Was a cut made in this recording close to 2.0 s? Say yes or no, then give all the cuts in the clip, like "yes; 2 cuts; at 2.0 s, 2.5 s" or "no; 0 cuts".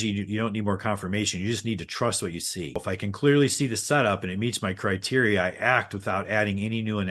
no; 0 cuts